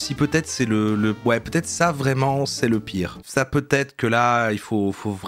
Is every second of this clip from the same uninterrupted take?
yes; 0 cuts

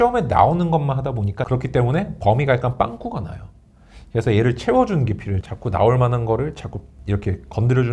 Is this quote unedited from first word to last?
no; 2 cuts; at 1.4 s, 5.4 s

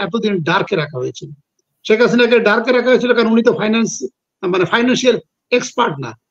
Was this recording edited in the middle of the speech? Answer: no; 0 cuts

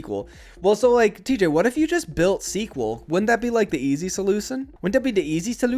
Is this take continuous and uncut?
no; 1 cut; at 4.7 s

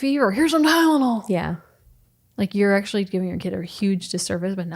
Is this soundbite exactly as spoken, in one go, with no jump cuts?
yes; 0 cuts

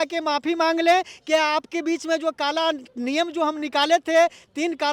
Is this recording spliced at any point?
no; 0 cuts

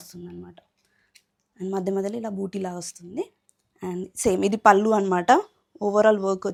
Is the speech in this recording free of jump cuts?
yes; 0 cuts

